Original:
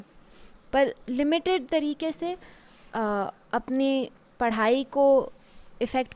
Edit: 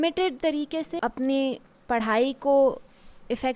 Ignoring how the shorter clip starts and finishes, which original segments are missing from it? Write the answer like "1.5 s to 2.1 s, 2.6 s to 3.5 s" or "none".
2.2 s to 3.4 s